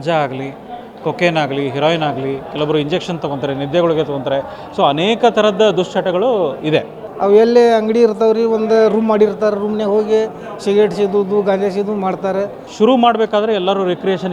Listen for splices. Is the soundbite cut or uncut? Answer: cut